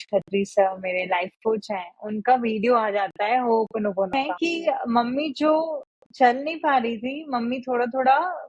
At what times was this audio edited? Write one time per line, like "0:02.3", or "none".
0:04.1